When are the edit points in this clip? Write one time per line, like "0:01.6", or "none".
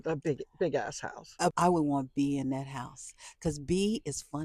0:01.5

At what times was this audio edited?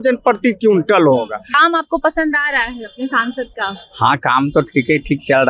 0:01.6

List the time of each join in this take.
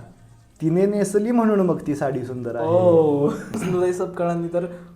0:03.5

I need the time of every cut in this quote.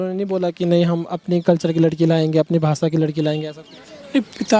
none

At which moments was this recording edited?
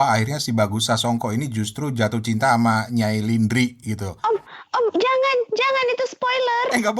0:04.1

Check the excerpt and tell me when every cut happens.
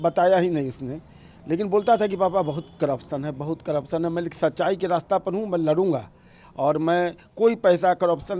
none

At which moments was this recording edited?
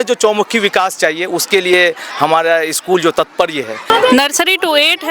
0:03.9

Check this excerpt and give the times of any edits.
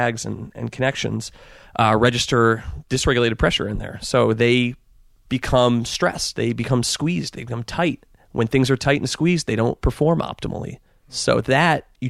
0:02.7
0:11.2

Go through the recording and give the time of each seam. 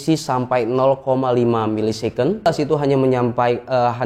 0:02.5

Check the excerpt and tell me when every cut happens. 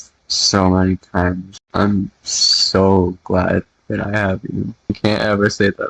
0:01.5
0:05.0

